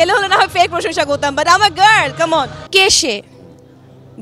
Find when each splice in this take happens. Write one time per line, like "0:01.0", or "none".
0:02.6